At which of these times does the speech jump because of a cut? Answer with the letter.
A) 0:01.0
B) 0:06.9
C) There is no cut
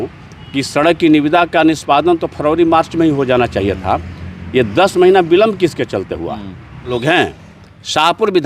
B